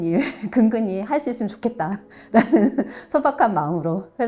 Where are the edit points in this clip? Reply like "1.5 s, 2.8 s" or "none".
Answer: none